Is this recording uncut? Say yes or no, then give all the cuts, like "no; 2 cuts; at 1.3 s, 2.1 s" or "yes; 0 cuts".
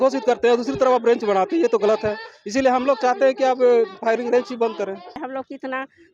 no; 1 cut; at 5.2 s